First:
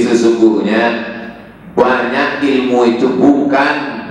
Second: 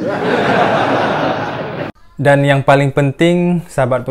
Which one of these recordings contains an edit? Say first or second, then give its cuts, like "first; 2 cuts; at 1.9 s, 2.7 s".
second; 1 cut; at 2.2 s